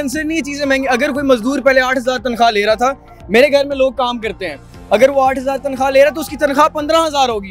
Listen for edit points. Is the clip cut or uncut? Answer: uncut